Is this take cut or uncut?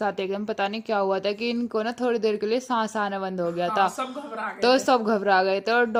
uncut